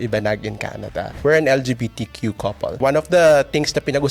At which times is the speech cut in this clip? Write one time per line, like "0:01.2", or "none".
0:01.1
0:02.8